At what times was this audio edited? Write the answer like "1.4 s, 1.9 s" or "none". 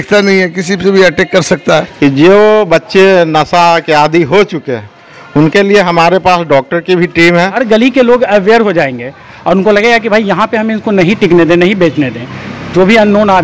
1.8 s, 7.5 s